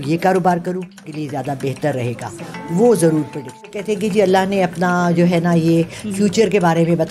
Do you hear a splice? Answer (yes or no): yes